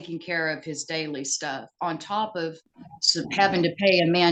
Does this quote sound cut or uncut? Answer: uncut